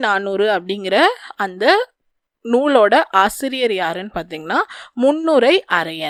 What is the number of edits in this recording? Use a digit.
0